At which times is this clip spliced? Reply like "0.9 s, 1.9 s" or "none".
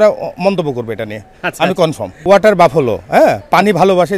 2.2 s